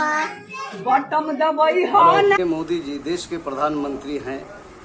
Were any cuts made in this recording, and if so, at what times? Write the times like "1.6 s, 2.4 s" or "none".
2.4 s